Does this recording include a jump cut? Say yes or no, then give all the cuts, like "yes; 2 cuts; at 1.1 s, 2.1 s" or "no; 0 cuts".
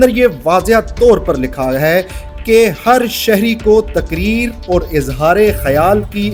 no; 0 cuts